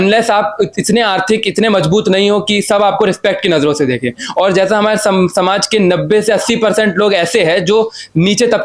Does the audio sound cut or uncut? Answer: uncut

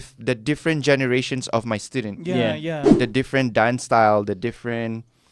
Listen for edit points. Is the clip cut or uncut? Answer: cut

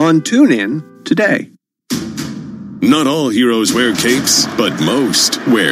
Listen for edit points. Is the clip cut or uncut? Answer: cut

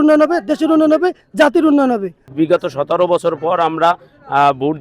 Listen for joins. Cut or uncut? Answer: cut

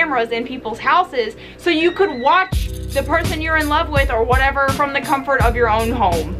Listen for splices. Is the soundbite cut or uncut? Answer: uncut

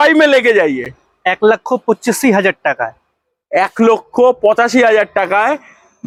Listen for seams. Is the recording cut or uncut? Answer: uncut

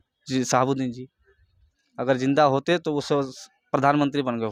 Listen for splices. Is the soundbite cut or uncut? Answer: uncut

